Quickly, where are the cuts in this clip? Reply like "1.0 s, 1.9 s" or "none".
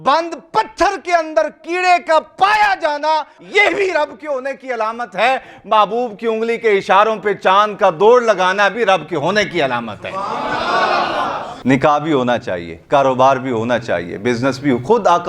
3.4 s, 11.5 s